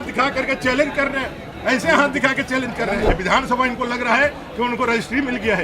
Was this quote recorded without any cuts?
no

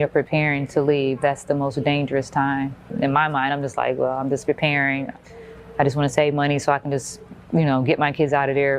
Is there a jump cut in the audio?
yes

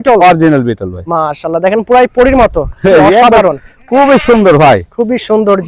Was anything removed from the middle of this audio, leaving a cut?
no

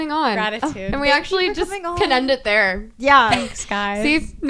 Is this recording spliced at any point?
no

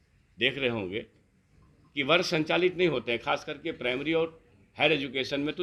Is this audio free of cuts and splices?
yes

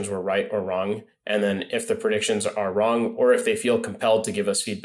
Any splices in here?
no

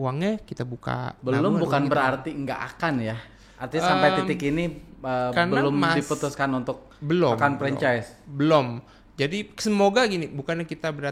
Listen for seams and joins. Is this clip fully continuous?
yes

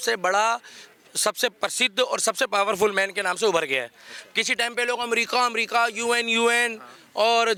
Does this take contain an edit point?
no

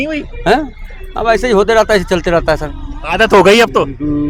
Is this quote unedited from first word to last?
yes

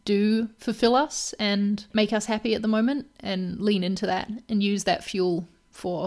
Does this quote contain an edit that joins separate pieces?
yes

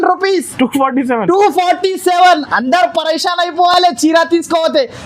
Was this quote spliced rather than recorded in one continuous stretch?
no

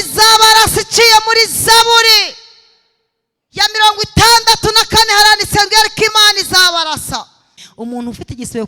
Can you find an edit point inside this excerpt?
yes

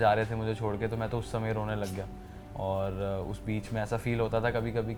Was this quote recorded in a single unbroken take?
yes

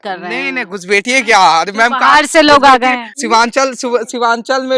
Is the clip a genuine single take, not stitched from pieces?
no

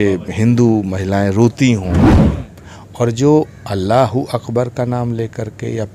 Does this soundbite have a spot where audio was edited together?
yes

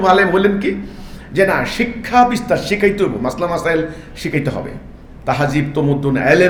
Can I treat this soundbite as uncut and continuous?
yes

